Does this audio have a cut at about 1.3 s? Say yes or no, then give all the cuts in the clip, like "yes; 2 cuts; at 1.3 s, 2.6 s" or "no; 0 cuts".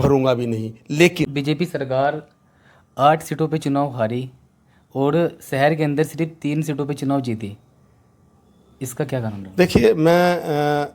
yes; 1 cut; at 1.3 s